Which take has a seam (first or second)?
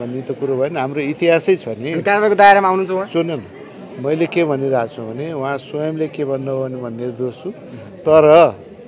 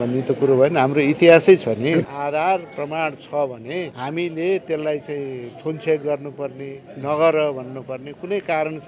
second